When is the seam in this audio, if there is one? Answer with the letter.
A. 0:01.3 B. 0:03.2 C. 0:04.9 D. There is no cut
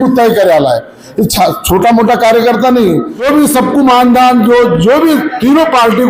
B